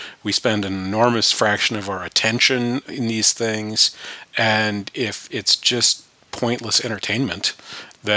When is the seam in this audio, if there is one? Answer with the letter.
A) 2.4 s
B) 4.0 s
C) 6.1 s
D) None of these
D